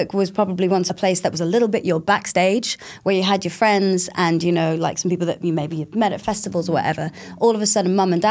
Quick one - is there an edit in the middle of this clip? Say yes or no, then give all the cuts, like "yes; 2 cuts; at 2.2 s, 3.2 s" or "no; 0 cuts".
yes; 1 cut; at 0.9 s